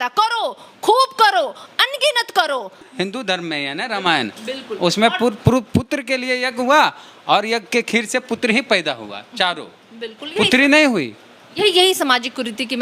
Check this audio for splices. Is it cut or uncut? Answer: cut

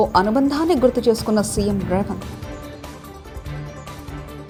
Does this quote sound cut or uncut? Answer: uncut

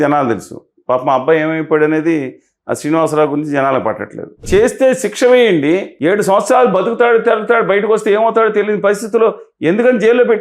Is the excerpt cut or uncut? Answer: cut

